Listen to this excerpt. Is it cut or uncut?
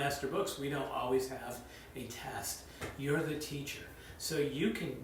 uncut